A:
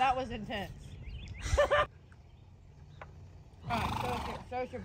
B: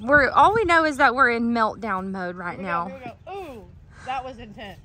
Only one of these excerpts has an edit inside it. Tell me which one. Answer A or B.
A